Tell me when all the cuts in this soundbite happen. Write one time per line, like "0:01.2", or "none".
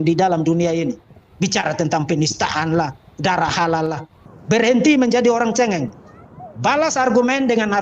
0:01.0
0:04.0